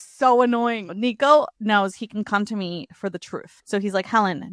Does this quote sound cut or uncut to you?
cut